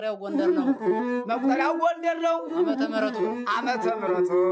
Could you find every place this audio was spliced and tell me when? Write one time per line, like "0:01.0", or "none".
none